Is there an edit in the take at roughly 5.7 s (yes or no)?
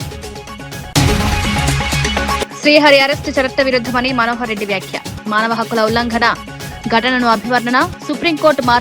no